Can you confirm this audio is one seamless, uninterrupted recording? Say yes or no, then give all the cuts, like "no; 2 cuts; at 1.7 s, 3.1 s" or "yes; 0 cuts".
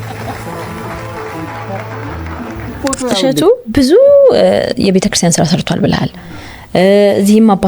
no; 1 cut; at 3.2 s